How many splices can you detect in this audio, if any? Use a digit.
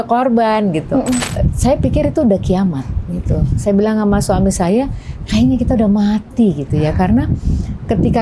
1